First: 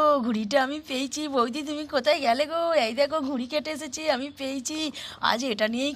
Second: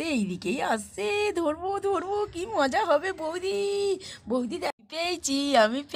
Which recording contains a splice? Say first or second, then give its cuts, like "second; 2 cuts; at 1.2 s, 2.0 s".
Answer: second; 1 cut; at 4.7 s